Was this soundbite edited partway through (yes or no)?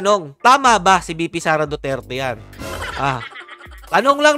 no